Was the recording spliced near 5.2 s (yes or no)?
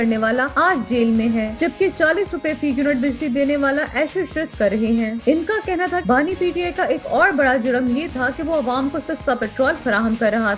no